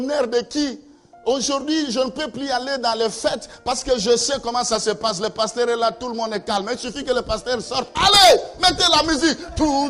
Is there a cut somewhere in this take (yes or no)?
no